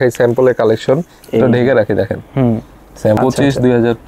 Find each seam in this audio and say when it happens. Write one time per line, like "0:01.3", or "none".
0:03.2